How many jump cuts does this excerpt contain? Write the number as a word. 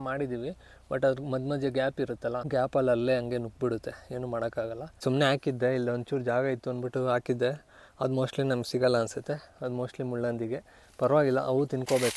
two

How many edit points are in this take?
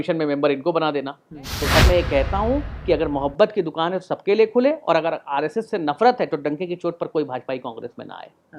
one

